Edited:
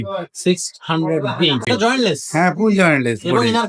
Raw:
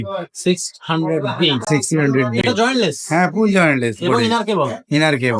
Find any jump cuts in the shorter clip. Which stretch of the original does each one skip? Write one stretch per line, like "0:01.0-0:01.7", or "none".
0:01.7-0:02.4